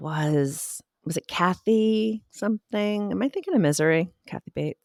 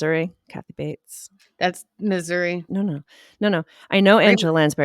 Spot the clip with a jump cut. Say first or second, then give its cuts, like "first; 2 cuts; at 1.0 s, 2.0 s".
second; 1 cut; at 2.6 s